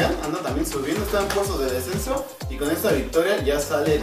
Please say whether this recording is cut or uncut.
cut